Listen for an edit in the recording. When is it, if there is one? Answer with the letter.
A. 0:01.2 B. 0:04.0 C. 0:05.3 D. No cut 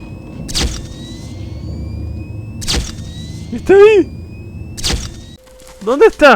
C